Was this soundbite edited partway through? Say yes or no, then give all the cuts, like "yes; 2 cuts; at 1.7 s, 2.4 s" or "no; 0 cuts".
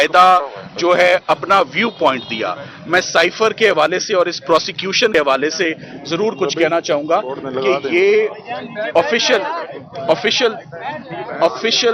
yes; 1 cut; at 5.1 s